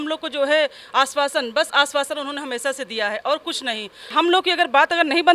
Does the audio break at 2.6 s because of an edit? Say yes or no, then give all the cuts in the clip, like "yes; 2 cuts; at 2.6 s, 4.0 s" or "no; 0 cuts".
no; 1 cut; at 4.0 s